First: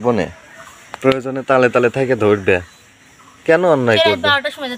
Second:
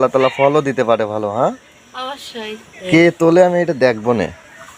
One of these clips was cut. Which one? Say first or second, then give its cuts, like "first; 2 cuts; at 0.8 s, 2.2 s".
second; 1 cut; at 2.8 s